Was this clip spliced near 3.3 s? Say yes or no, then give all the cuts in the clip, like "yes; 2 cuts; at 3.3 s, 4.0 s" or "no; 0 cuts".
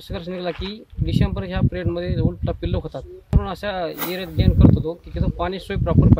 yes; 1 cut; at 3.3 s